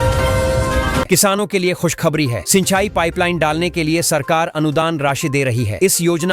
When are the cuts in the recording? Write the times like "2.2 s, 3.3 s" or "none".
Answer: 1.1 s